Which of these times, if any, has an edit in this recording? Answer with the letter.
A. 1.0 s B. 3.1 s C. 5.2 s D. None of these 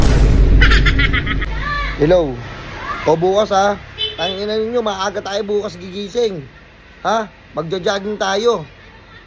A